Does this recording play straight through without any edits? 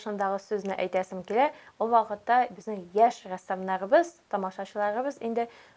yes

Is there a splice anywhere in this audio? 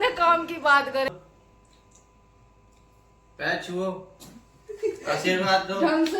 yes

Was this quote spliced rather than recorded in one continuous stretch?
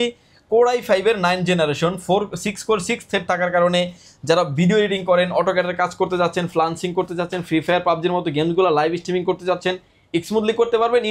no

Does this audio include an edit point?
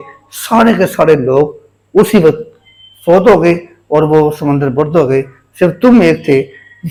no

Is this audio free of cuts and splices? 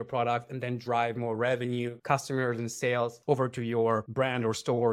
yes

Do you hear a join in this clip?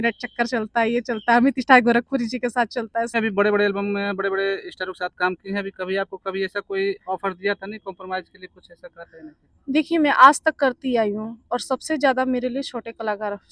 yes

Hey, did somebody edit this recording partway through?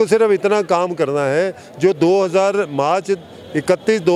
no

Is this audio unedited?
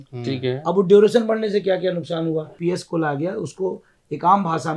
no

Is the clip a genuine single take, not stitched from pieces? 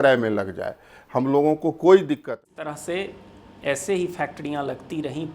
no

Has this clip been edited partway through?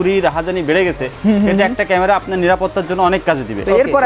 no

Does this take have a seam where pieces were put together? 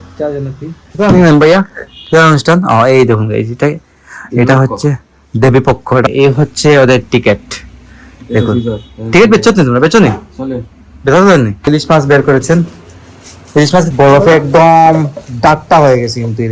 yes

